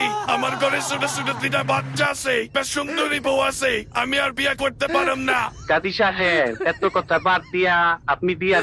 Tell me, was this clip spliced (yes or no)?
yes